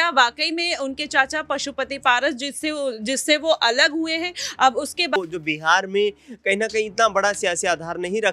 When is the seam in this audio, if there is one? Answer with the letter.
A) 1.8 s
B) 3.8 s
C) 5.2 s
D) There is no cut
C